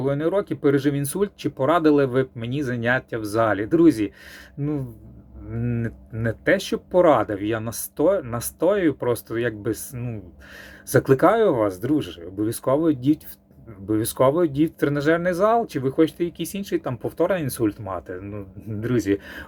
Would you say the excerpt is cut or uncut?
uncut